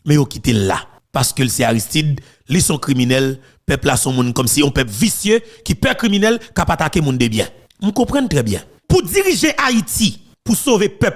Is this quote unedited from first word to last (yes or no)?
no